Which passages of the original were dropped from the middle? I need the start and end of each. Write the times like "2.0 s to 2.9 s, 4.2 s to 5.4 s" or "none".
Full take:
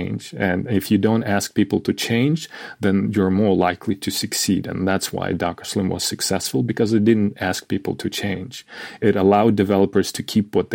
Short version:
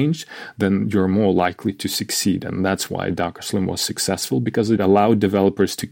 7.0 s to 9.1 s